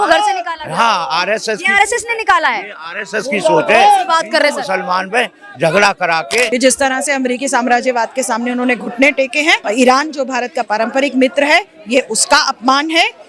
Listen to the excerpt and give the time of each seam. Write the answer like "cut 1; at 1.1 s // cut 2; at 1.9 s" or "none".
cut 1; at 6.5 s // cut 2; at 9.6 s